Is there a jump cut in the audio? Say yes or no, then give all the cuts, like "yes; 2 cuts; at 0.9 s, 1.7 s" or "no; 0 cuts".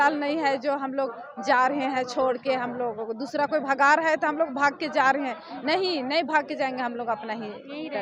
no; 0 cuts